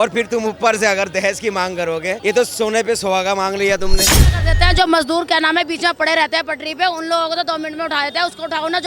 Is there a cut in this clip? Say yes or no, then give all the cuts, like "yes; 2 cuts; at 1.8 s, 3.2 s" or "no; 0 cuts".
yes; 1 cut; at 4.2 s